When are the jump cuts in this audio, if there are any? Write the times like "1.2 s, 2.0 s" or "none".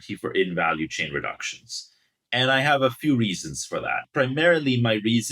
4.0 s